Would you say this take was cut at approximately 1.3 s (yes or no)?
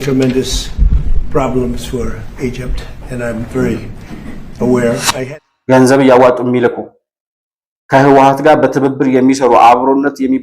no